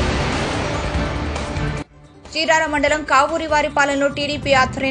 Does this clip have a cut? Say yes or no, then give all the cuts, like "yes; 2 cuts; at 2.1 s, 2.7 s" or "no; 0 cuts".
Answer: yes; 1 cut; at 2.0 s